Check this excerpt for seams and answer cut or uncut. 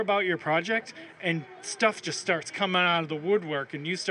uncut